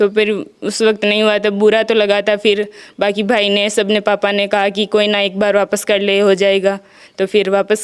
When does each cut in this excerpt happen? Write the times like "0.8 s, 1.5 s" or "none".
none